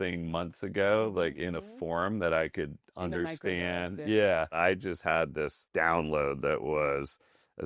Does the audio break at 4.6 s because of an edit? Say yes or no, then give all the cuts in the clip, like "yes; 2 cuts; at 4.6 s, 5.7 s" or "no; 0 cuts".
yes; 2 cuts; at 4.6 s, 5.6 s